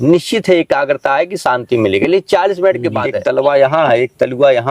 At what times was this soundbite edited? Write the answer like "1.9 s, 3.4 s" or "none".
3.1 s

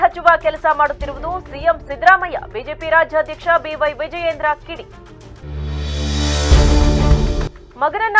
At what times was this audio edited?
none

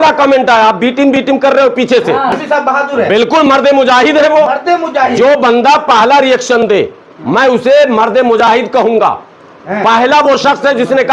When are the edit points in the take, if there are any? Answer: 2.4 s

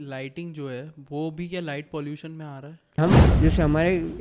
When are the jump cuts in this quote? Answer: 3.0 s

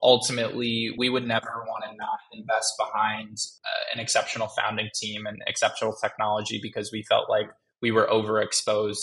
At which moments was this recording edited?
0.9 s

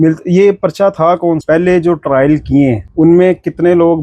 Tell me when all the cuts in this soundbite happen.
1.4 s, 2.8 s

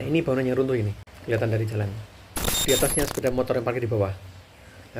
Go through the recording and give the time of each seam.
1.1 s, 2.6 s

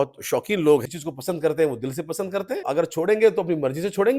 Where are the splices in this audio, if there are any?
0.8 s, 2.6 s

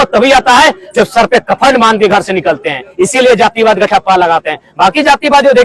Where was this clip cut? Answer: none

